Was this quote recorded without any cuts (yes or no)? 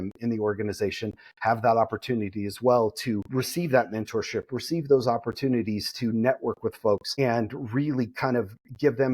no